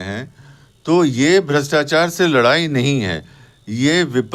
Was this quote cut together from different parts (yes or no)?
no